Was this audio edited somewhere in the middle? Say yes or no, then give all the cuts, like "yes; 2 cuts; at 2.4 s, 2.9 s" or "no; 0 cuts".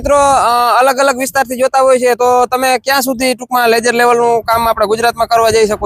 no; 0 cuts